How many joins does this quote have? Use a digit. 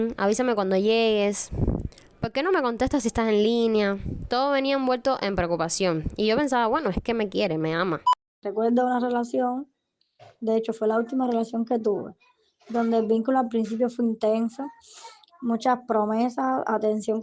1